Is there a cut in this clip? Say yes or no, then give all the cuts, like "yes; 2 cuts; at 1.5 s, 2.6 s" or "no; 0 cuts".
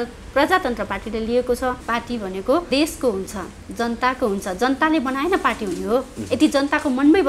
yes; 1 cut; at 2.2 s